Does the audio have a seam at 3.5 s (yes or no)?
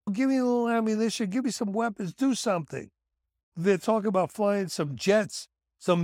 yes